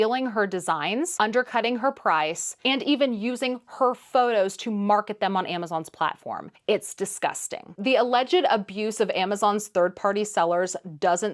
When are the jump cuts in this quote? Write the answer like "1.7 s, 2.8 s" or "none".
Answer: 1.1 s, 6.5 s, 7.7 s